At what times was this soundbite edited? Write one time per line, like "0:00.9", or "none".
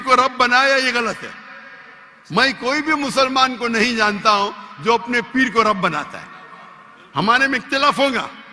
none